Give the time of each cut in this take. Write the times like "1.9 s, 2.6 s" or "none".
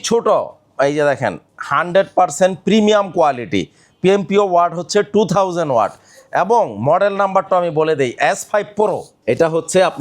9.1 s